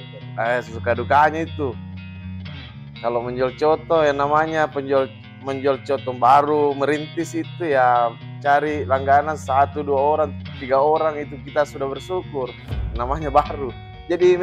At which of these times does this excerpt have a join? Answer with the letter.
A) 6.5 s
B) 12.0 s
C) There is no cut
C